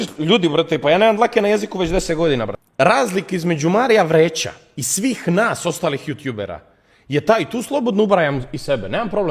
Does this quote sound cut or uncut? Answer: cut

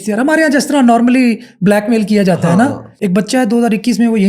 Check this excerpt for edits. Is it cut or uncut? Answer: cut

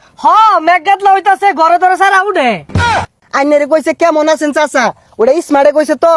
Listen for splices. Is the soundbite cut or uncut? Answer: cut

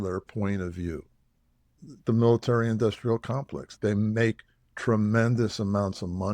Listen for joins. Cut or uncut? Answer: cut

